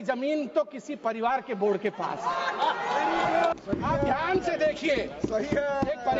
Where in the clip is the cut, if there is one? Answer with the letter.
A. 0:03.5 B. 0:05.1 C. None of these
A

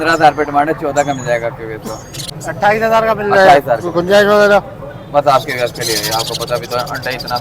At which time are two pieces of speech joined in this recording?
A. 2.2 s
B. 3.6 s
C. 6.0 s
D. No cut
A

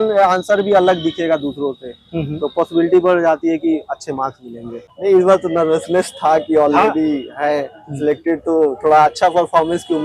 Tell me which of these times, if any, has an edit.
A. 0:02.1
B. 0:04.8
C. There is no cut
B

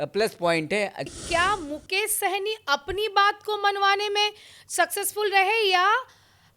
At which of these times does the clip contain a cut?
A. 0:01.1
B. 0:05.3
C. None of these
A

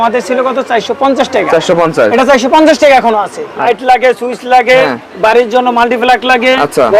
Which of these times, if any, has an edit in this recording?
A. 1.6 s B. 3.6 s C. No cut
B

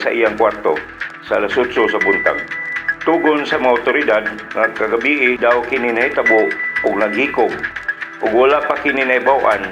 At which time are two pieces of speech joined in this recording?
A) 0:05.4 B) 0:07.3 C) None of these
A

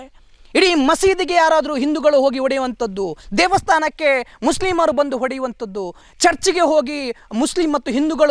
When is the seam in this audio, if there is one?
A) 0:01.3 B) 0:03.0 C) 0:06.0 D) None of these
C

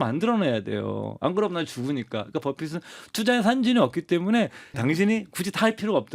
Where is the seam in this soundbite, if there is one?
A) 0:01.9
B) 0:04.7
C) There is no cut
B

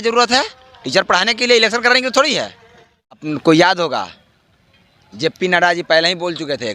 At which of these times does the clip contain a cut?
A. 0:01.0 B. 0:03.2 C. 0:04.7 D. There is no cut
B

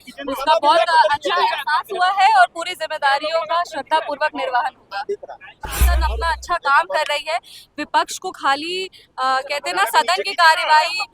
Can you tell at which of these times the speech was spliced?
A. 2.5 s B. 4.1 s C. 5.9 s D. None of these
C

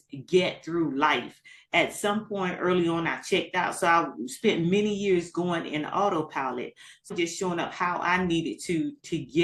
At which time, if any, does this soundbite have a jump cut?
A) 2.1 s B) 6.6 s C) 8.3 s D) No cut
D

